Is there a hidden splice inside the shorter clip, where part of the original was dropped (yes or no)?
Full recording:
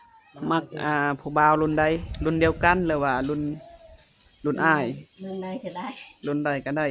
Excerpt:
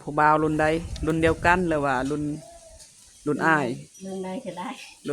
no